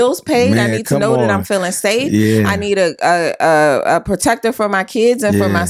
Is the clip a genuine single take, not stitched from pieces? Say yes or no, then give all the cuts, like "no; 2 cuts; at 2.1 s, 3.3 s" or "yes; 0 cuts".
yes; 0 cuts